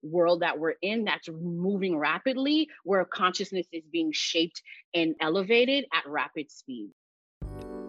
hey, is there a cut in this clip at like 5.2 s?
yes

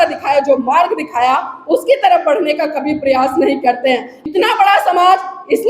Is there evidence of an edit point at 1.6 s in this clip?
no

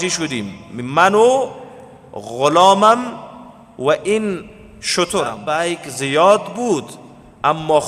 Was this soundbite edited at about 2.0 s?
no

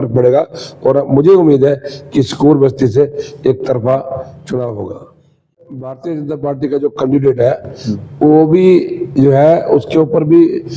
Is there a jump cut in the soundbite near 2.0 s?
no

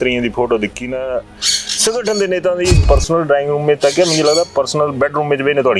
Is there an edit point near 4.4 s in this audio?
no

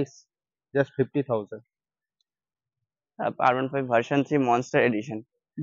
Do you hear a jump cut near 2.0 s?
no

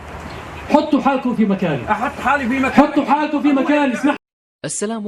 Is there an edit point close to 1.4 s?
no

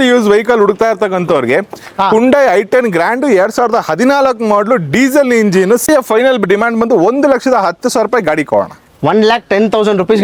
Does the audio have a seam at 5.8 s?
yes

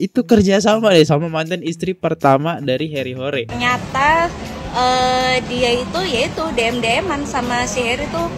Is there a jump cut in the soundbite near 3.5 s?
yes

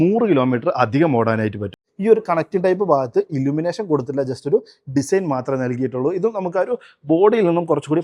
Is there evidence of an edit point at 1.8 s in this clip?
yes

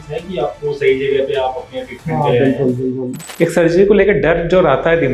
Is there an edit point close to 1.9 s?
no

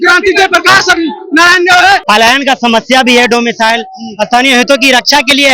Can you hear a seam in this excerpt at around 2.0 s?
yes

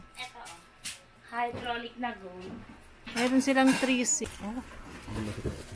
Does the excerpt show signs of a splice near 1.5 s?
no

